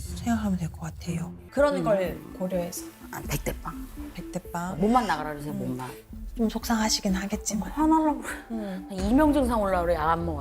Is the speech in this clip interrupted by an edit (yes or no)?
yes